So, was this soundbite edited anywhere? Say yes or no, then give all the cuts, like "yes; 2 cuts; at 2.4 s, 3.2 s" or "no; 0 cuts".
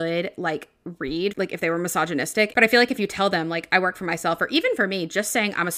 yes; 2 cuts; at 1.3 s, 2.5 s